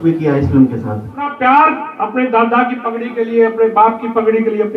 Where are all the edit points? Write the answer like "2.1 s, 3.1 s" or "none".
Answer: 1.3 s